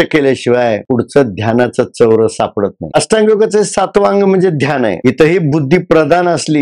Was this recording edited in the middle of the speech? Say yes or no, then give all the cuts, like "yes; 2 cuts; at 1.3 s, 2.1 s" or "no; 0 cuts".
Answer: yes; 2 cuts; at 2.9 s, 5.0 s